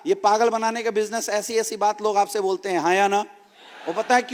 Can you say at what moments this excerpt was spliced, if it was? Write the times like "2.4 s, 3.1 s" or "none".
none